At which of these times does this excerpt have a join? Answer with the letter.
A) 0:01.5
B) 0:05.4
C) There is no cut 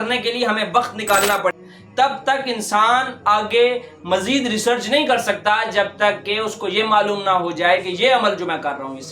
A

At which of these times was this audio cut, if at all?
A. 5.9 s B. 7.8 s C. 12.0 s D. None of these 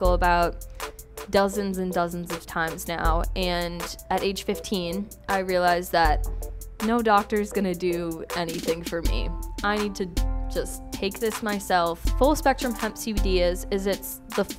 C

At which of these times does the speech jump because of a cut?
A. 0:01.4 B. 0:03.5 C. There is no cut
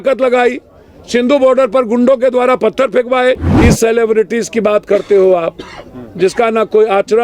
B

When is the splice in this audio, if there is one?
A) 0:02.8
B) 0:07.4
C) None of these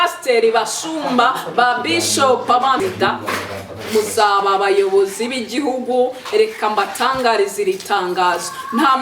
A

